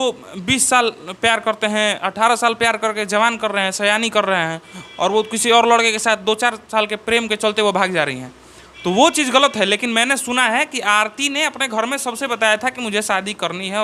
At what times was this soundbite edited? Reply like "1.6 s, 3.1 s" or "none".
none